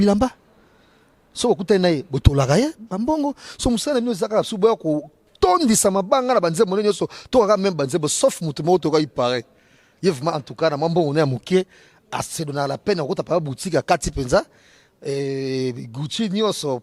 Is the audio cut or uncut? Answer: uncut